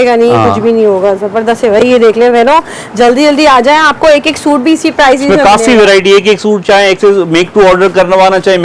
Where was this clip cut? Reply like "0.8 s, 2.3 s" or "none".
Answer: none